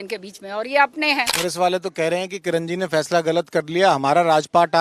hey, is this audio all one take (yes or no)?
no